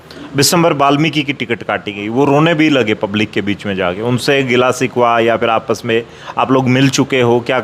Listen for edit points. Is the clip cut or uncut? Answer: uncut